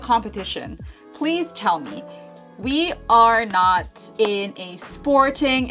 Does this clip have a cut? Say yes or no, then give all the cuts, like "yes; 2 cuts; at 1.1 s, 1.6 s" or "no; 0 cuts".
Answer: no; 0 cuts